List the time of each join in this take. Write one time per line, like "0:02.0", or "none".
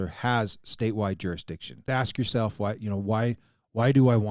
0:01.8